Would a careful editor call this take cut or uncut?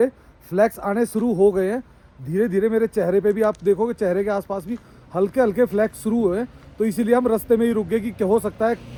uncut